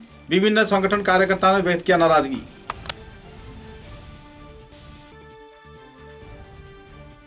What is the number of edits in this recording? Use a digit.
0